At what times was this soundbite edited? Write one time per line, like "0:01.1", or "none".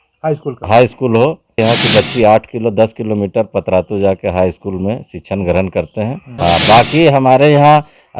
0:01.6
0:06.2